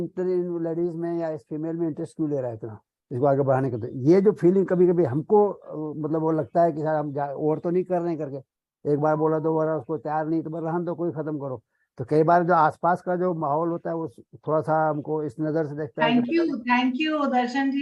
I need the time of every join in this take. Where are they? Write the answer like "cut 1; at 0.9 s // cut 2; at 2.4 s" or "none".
none

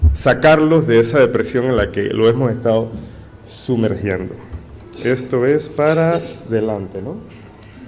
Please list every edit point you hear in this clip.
none

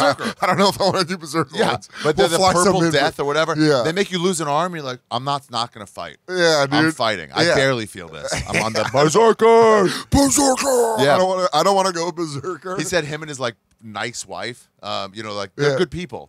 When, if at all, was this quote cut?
none

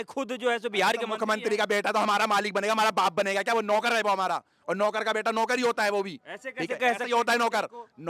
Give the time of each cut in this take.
none

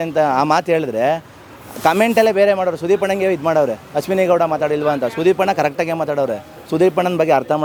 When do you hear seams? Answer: none

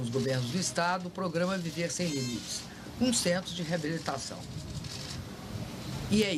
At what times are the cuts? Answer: none

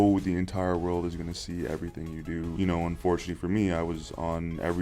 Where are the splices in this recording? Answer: cut 1; at 2.5 s

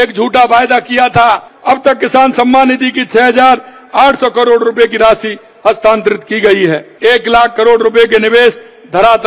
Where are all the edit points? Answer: cut 1; at 1.5 s // cut 2; at 6.9 s

